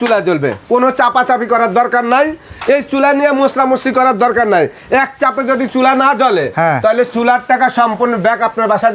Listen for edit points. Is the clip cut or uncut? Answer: uncut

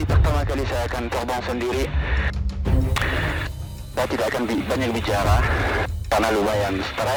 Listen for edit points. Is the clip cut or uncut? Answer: uncut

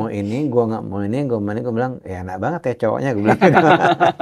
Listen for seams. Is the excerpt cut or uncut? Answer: uncut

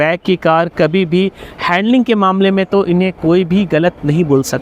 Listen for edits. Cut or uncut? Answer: uncut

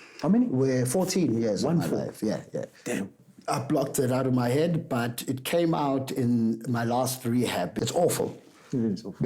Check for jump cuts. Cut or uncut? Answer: cut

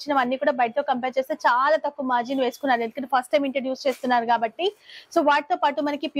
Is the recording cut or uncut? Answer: uncut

